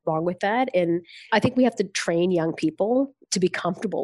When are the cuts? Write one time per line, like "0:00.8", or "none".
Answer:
none